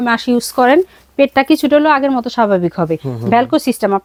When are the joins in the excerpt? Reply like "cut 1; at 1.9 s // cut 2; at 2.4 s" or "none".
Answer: none